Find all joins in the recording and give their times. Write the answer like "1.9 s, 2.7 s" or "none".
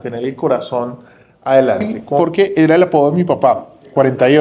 2.2 s